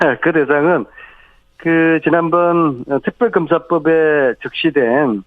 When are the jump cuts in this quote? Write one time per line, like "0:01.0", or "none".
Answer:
0:02.0